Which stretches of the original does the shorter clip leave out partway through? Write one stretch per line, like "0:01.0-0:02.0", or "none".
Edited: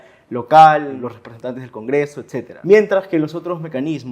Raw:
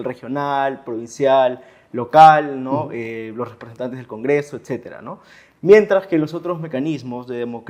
0:02.6-0:03.3
0:04.9-0:05.5